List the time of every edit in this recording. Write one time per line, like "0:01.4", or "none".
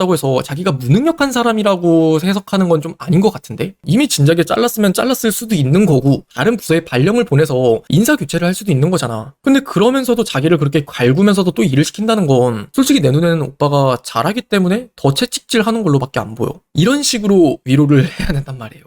0:03.8